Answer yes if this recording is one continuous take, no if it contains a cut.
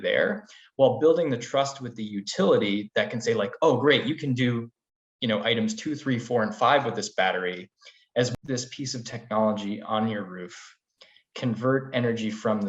no